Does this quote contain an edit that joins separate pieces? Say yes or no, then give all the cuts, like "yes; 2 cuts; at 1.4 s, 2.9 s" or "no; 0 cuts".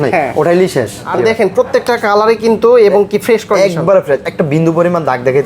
yes; 1 cut; at 1.1 s